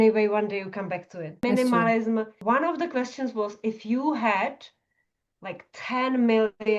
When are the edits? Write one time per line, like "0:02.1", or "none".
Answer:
0:01.4
0:02.3